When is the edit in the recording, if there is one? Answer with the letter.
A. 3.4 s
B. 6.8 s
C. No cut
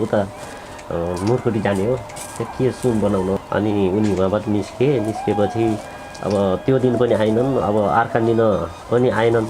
A